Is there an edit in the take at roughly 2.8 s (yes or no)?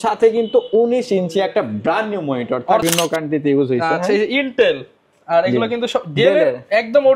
yes